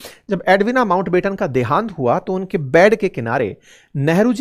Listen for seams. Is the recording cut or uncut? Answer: uncut